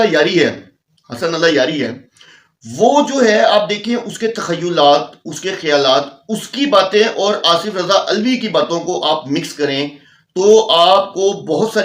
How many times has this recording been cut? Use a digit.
0